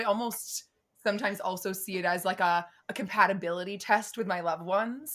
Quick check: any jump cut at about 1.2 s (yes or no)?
no